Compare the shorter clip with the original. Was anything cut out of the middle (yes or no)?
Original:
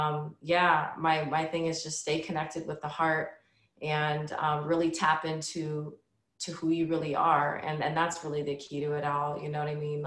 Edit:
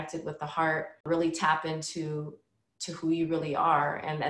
yes